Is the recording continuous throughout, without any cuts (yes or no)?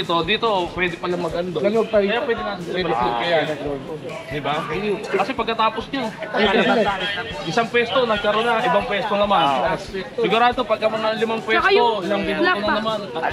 yes